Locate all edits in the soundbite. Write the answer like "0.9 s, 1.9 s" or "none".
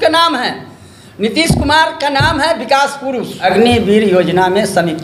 3.4 s